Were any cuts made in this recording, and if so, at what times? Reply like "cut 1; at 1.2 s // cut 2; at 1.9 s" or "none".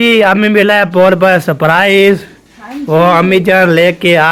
none